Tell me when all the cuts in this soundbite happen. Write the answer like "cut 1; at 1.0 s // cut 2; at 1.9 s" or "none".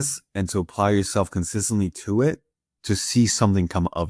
none